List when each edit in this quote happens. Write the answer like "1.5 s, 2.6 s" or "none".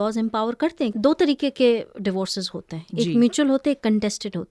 0.9 s